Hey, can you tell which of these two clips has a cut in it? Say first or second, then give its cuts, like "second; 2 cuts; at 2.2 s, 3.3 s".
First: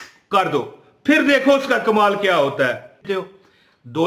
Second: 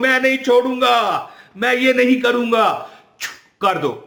first; 1 cut; at 3.0 s